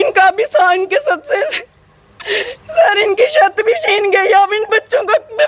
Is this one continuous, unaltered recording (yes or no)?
yes